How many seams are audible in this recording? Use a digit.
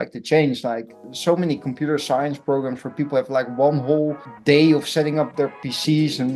1